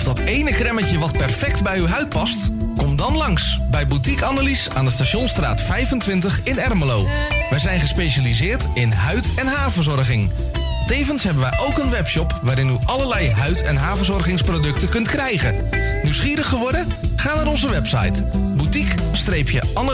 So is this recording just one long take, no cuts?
yes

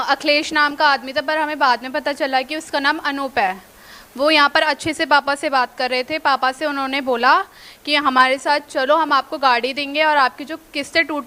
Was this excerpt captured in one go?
yes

